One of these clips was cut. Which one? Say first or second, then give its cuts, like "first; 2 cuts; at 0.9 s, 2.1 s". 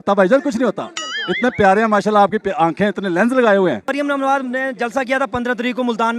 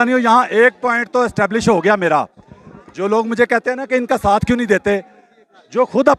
first; 1 cut; at 3.9 s